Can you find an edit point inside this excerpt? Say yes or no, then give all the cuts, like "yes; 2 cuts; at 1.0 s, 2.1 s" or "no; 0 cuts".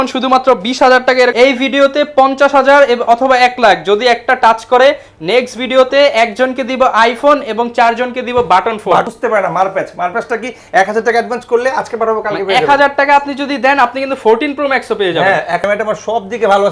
yes; 3 cuts; at 1.3 s, 9.1 s, 15.6 s